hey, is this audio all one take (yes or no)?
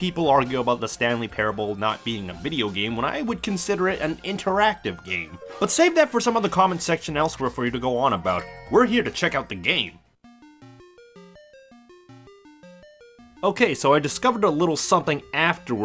yes